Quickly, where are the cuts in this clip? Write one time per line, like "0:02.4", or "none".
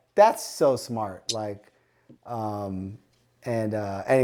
none